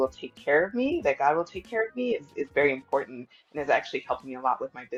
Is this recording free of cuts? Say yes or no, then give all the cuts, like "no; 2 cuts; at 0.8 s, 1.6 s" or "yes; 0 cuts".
yes; 0 cuts